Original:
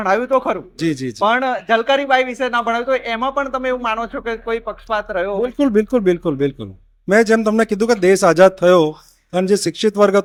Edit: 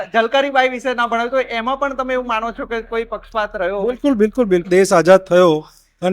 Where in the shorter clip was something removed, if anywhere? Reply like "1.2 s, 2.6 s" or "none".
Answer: 4.7 s